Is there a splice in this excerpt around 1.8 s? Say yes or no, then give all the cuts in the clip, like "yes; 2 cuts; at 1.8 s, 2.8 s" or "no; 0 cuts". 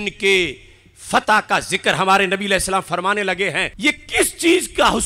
no; 1 cut; at 3.7 s